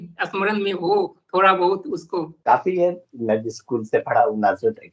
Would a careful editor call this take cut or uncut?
cut